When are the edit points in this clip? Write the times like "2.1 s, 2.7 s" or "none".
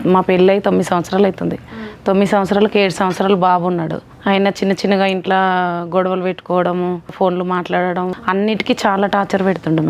4.0 s, 7.1 s, 8.2 s